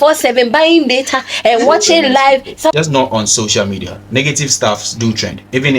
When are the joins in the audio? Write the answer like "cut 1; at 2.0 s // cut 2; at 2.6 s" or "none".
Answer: cut 1; at 2.7 s